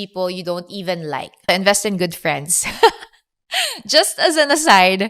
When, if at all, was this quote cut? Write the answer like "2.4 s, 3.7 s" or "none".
1.5 s